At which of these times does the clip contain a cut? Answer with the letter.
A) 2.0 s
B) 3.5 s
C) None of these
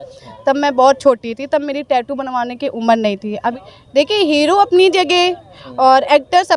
B